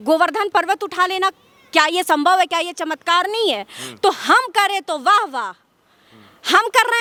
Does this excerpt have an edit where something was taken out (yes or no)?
no